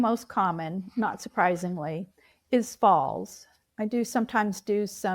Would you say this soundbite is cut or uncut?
cut